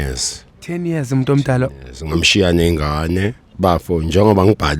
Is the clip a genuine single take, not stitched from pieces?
no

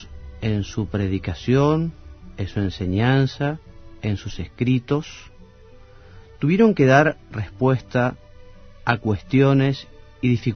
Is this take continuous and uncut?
no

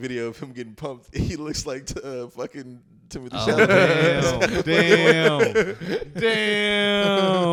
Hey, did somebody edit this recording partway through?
no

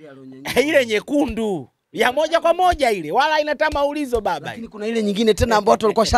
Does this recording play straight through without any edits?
yes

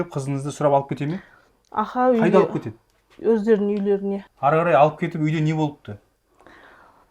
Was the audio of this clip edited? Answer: yes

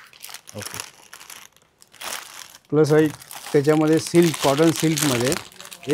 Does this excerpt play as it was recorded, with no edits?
yes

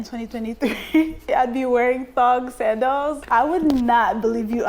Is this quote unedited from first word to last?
no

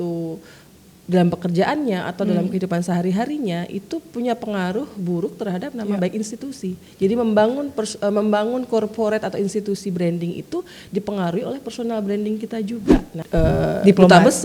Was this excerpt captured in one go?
no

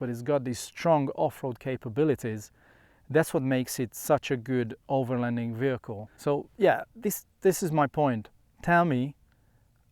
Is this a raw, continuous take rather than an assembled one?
no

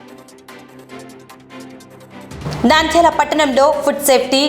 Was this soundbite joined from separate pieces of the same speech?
yes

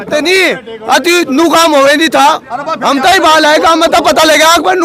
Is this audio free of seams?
yes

